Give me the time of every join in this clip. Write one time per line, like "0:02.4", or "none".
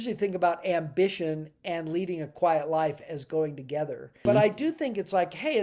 0:04.2